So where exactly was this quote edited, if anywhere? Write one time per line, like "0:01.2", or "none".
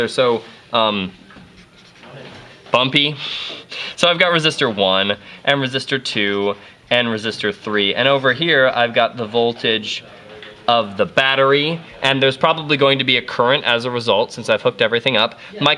0:14.0